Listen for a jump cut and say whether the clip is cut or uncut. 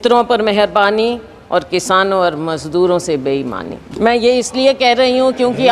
cut